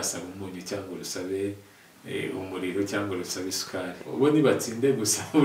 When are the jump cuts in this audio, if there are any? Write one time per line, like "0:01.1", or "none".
0:04.1